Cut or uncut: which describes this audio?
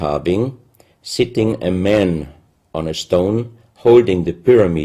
cut